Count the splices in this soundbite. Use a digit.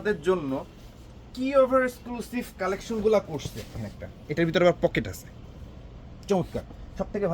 1